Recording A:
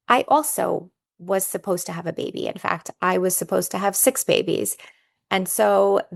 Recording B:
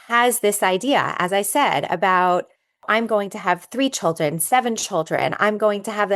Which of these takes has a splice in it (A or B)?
B